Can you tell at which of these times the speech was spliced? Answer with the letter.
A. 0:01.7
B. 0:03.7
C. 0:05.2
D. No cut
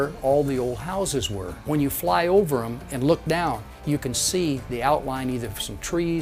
A